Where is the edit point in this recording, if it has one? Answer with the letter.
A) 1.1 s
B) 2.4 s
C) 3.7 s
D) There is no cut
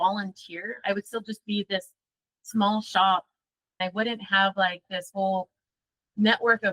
C